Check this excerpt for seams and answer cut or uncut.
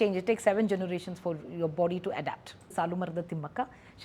cut